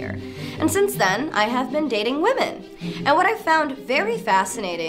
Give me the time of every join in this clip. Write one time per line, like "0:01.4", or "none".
none